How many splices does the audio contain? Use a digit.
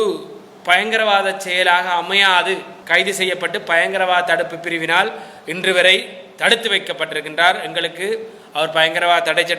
1